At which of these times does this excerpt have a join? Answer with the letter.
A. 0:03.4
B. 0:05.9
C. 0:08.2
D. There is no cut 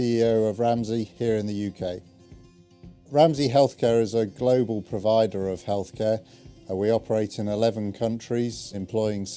C